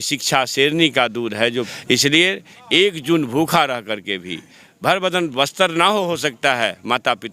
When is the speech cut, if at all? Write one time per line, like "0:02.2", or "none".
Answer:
0:01.7